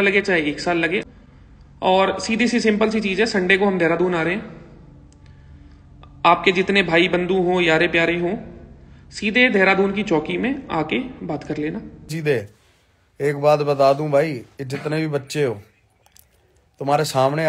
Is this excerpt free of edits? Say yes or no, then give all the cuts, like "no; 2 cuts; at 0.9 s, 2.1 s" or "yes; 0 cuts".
no; 2 cuts; at 1.0 s, 12.1 s